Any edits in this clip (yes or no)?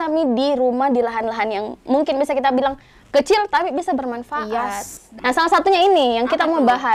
yes